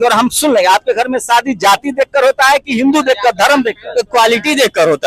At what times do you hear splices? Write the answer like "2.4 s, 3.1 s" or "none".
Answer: none